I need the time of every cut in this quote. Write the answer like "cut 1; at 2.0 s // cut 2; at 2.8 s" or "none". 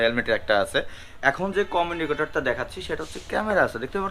cut 1; at 1.0 s